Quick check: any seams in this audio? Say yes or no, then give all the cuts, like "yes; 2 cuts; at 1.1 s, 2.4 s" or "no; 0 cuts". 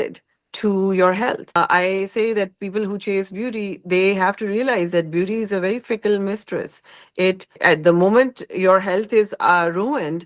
yes; 2 cuts; at 1.6 s, 7.6 s